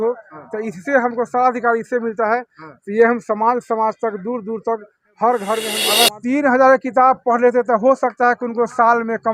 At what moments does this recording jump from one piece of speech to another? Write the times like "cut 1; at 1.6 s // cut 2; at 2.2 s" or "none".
cut 1; at 5.8 s